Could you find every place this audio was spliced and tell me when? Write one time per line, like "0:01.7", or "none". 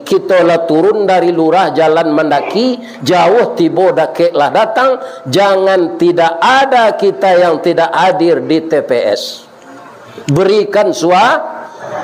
none